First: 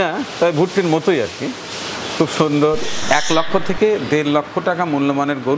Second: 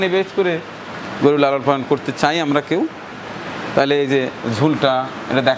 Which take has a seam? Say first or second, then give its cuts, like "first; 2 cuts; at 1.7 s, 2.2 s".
first; 1 cut; at 2.9 s